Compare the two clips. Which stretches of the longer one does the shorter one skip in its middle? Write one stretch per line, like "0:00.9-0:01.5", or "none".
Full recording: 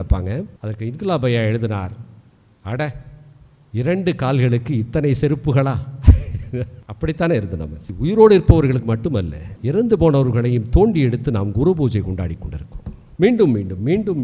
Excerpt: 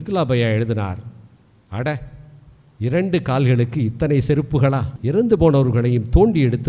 0:05.8-0:09.5